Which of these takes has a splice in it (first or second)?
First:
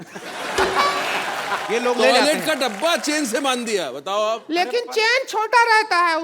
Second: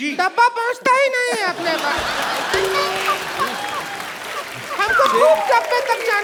first